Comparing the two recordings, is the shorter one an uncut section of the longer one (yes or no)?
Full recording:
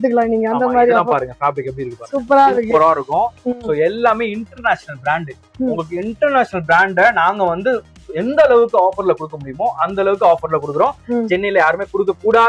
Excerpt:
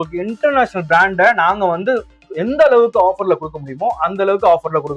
yes